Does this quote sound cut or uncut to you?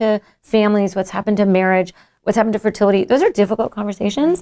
uncut